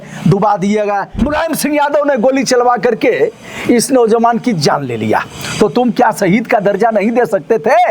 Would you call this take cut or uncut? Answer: cut